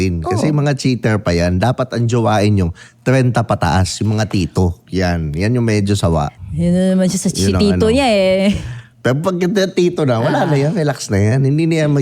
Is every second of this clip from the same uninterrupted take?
no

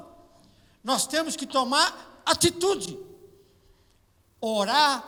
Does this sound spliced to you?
no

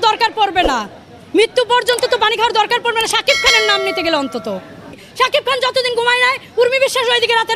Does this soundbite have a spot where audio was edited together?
yes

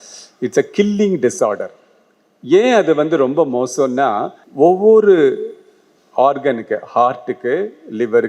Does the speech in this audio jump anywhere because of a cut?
yes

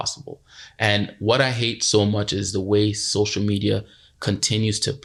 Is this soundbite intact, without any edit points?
yes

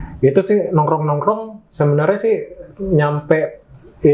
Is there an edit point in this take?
no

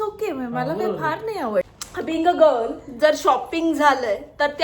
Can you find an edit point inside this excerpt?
yes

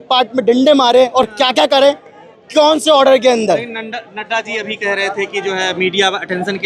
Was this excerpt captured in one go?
yes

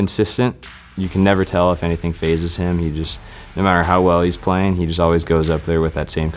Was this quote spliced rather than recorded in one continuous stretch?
no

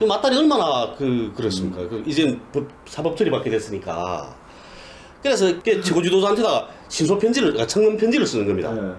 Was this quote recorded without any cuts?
no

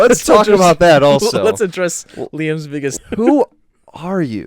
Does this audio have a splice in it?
yes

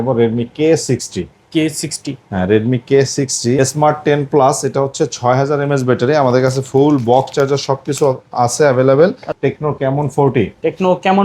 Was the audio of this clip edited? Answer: yes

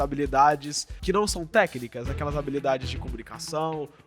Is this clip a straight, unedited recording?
no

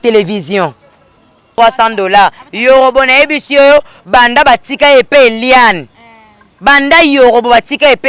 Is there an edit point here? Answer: yes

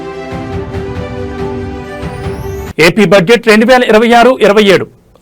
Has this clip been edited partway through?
yes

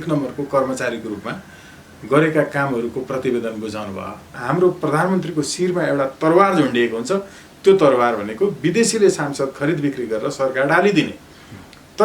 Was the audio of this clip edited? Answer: yes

